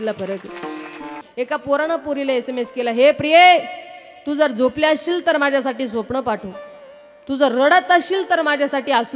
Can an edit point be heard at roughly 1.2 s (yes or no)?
yes